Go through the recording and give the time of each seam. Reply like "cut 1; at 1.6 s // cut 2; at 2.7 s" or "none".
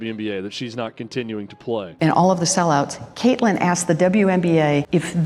cut 1; at 1.9 s